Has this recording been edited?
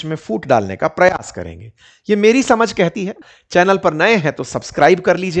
yes; 1 cut; at 3.2 s

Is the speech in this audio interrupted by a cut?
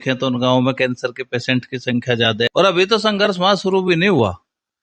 yes; 1 cut; at 2.5 s

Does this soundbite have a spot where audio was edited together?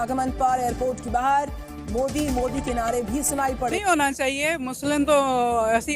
yes; 1 cut; at 3.8 s

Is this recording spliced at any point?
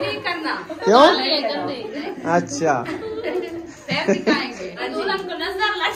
yes; 1 cut; at 4.8 s

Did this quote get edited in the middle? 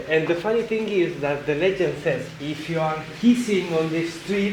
yes; 1 cut; at 2.4 s

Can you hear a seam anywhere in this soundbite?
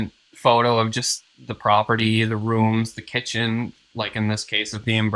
no; 0 cuts

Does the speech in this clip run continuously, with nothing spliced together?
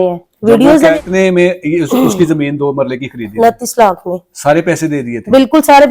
no; 1 cut; at 1.0 s

